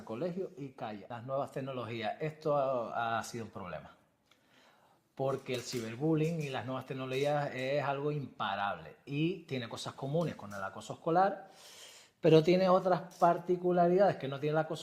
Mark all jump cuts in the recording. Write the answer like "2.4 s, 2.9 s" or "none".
1.0 s